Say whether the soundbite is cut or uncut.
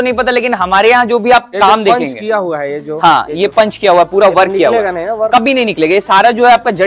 uncut